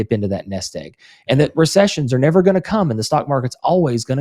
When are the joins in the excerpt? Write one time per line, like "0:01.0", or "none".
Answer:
none

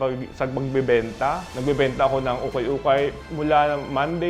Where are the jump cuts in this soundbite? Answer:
0:01.5
0:03.2

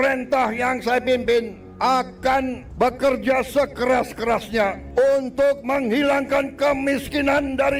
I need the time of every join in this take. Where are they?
0:01.6
0:02.6
0:04.8

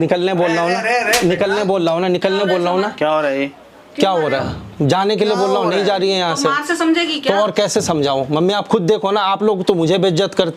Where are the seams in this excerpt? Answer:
none

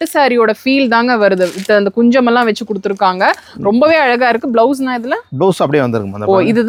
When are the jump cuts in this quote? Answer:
none

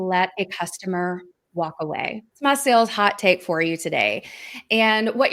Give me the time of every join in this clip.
0:02.2

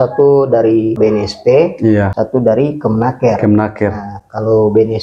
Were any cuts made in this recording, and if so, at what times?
0:01.0
0:02.1

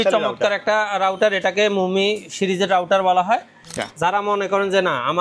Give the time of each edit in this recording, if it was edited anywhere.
0:03.7

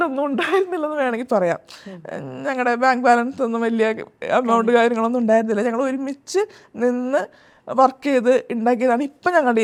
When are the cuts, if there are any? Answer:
none

